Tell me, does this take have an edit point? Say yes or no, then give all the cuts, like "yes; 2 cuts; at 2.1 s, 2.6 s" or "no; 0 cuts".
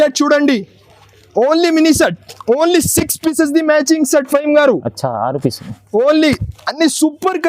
no; 0 cuts